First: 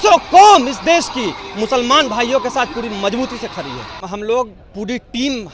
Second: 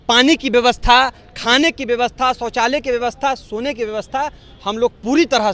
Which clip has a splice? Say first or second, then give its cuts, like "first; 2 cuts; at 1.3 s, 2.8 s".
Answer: first; 1 cut; at 4.0 s